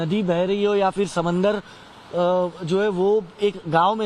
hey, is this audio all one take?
yes; 0 cuts

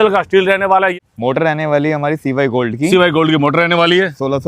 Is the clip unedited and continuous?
no; 1 cut; at 1.0 s

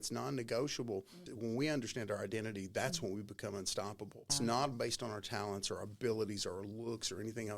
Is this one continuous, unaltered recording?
no; 2 cuts; at 1.2 s, 4.3 s

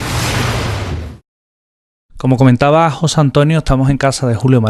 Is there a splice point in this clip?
yes; 1 cut; at 3.3 s

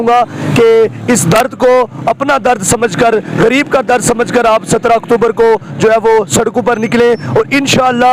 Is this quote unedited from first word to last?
yes; 0 cuts

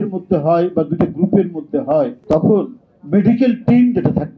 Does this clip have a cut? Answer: yes; 1 cut; at 2.2 s

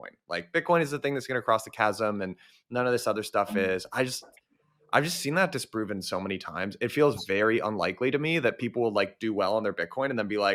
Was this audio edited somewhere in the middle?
no; 0 cuts

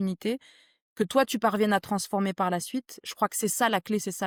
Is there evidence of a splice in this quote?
no; 0 cuts

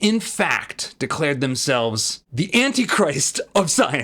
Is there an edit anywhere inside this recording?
no; 0 cuts

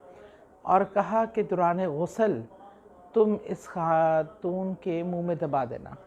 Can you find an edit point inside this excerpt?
no; 0 cuts

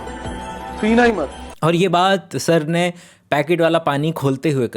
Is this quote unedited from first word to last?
no; 1 cut; at 1.1 s

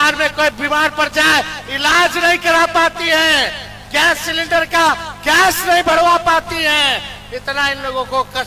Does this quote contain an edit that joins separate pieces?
no; 0 cuts

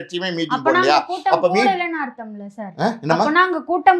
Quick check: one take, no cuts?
yes; 0 cuts

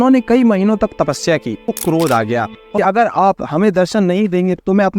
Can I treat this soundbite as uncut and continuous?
no; 2 cuts; at 1.8 s, 2.6 s

